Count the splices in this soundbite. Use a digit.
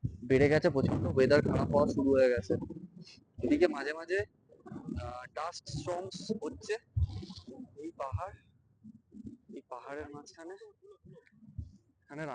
0